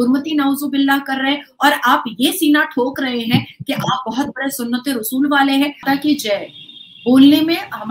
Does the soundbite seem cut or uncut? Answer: cut